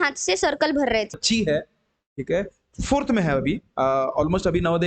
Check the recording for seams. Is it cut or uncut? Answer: cut